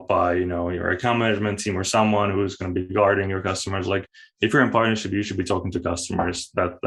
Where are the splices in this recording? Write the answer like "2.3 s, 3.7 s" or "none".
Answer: none